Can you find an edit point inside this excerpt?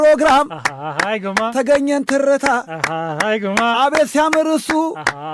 no; 0 cuts

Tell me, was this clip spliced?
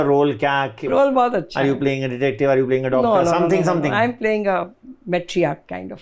yes; 2 cuts; at 0.8 s, 4.9 s

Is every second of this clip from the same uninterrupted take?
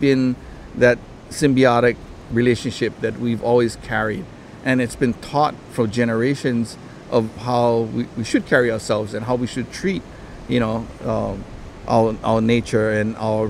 yes; 0 cuts

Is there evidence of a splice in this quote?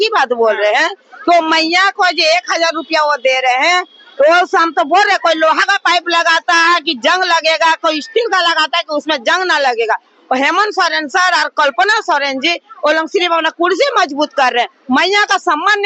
no; 0 cuts

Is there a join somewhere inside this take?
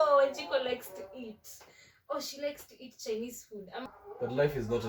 yes; 1 cut; at 3.8 s

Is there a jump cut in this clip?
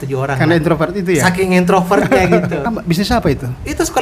yes; 1 cut; at 2.7 s

